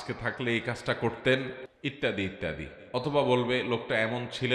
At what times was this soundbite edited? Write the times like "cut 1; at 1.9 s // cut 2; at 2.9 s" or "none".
cut 1; at 1.6 s